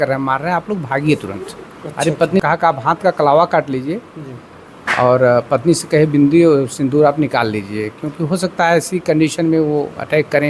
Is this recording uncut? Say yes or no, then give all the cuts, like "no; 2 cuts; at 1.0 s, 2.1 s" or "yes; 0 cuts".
no; 1 cut; at 2.4 s